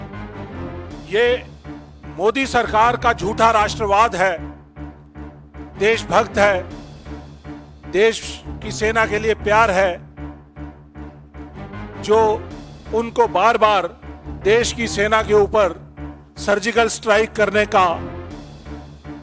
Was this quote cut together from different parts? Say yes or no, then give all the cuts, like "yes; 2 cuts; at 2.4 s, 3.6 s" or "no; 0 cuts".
yes; 1 cut; at 18.3 s